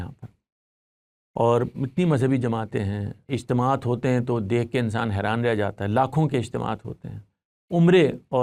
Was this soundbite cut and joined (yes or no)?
no